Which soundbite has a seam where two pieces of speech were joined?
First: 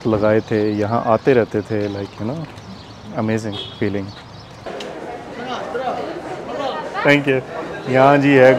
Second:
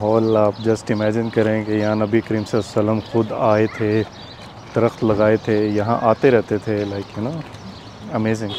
first; 1 cut; at 4.6 s

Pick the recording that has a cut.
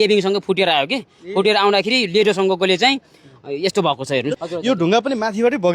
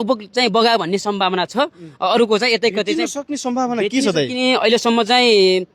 first; 1 cut; at 4.4 s

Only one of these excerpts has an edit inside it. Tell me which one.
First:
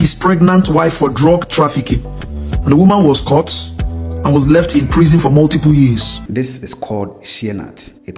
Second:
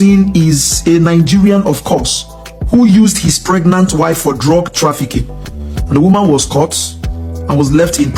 first; 1 cut; at 6.2 s

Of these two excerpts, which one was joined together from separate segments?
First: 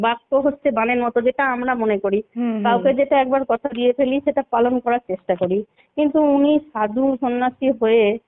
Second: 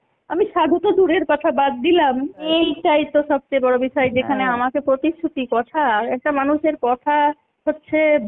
second; 1 cut; at 2.5 s

